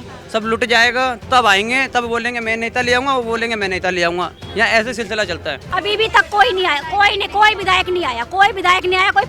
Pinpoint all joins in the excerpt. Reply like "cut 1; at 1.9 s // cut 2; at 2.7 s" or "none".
cut 1; at 5.7 s